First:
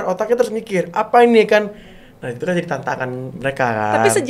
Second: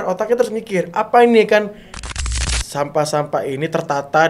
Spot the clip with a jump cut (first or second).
second